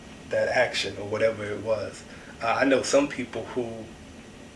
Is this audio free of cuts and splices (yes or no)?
yes